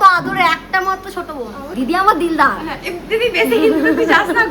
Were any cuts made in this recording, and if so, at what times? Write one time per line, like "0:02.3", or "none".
0:01.6